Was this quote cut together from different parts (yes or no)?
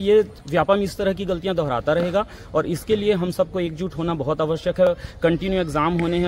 no